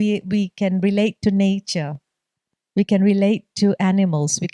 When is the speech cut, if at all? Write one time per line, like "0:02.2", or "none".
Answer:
none

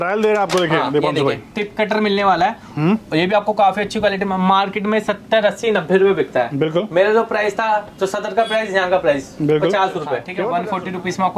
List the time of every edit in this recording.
0:10.3

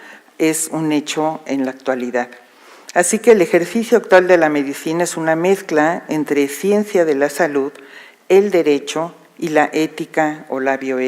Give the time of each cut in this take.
0:07.1

